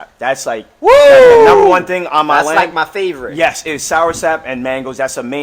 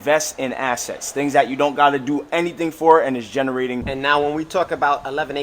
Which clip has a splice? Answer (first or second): second